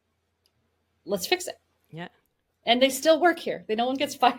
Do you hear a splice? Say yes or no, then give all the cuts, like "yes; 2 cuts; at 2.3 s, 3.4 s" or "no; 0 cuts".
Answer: no; 0 cuts